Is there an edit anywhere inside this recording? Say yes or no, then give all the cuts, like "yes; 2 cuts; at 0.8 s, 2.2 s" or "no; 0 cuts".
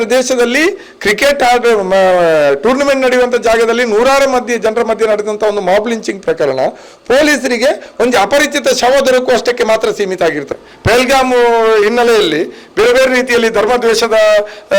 yes; 1 cut; at 10.5 s